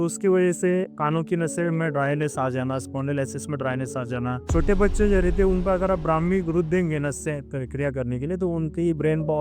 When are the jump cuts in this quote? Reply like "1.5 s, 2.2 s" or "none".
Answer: 0.9 s, 4.4 s